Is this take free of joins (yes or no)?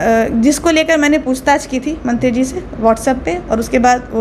yes